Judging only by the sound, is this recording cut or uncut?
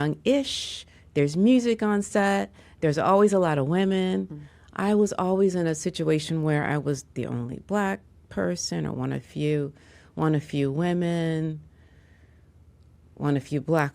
uncut